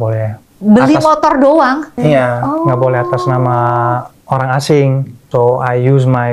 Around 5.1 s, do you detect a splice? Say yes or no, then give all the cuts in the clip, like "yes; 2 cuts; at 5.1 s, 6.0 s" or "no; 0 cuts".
yes; 2 cuts; at 2.0 s, 5.1 s